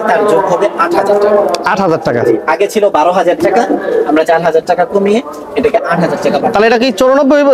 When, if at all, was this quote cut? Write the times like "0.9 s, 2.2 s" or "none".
none